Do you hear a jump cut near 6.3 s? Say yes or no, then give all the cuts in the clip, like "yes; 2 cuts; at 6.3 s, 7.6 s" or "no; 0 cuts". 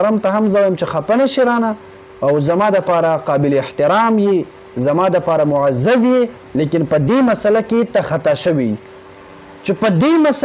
no; 1 cut; at 8.9 s